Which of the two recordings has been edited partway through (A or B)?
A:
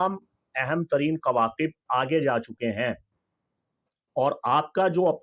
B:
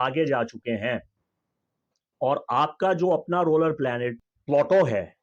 B